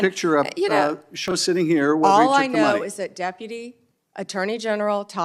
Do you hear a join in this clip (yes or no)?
yes